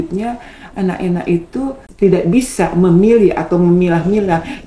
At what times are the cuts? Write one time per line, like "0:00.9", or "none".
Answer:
0:01.9